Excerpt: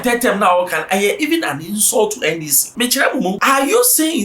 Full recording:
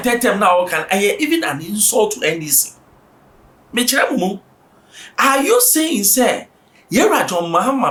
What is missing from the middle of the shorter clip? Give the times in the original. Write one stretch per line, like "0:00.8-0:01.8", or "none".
0:02.6-0:03.6
0:04.4-0:05.2